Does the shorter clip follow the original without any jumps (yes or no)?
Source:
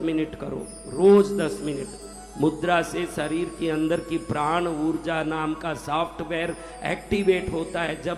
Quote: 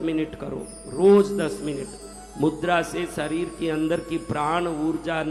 yes